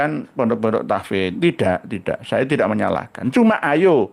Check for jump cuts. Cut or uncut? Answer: uncut